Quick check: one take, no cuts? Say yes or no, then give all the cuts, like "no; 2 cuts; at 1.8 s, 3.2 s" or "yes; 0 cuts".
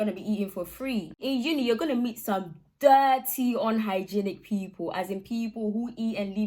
no; 1 cut; at 1.2 s